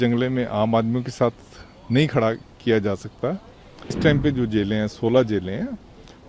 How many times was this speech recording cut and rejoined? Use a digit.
1